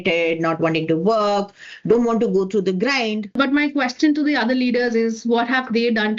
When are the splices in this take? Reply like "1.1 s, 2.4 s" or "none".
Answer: 3.3 s